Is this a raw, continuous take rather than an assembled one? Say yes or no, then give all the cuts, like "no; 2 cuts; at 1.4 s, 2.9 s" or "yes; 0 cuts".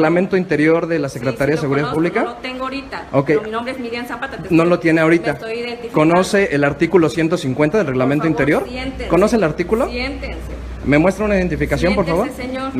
yes; 0 cuts